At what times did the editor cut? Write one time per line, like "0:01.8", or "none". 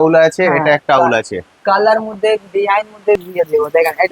0:03.1